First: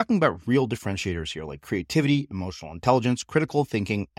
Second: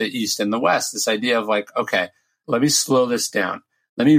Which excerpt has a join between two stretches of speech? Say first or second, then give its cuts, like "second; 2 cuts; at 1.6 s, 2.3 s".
second; 1 cut; at 2.3 s